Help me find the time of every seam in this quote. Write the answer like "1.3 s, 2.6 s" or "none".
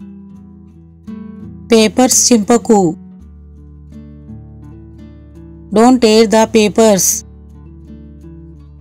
1.2 s, 3.0 s, 5.5 s, 7.0 s